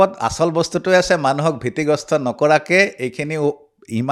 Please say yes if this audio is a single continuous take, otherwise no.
yes